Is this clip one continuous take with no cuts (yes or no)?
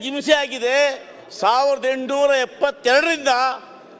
yes